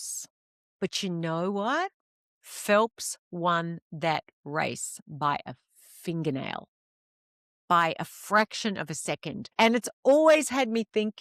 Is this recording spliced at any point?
yes; 1 cut; at 9.4 s

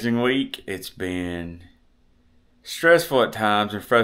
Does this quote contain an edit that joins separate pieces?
no; 0 cuts

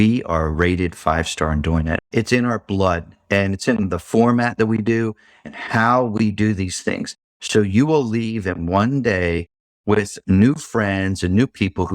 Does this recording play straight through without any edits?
no; 1 cut; at 1.9 s

